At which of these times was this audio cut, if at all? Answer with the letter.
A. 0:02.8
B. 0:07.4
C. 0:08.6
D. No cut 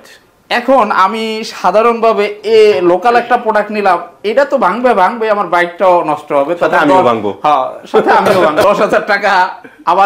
C